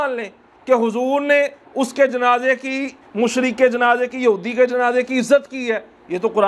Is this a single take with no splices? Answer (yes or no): yes